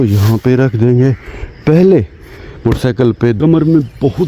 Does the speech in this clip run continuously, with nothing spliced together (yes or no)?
no